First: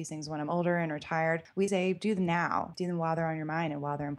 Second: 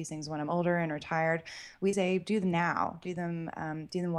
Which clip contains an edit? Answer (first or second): first